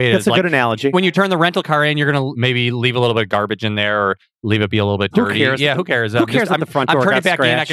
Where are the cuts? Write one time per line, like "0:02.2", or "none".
0:02.3